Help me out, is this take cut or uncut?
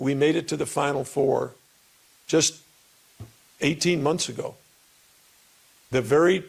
uncut